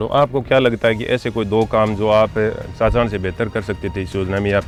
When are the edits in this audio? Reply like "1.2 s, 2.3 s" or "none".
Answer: none

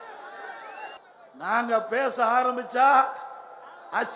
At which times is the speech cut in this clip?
1.0 s

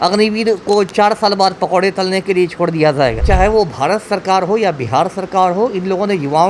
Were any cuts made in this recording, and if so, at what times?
3.2 s

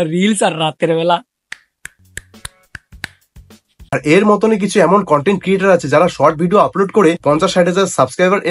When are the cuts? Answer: 3.9 s

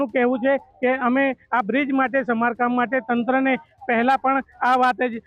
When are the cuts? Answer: none

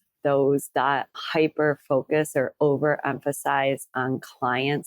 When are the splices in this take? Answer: 1.2 s

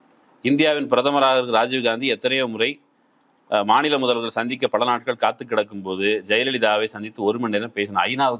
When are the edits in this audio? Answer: none

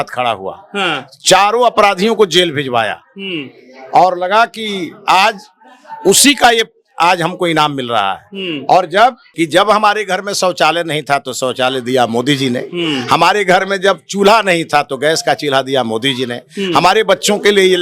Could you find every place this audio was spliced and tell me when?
9.2 s

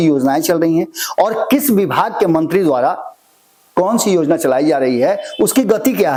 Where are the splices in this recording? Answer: none

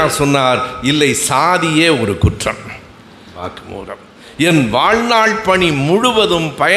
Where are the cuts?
3.4 s

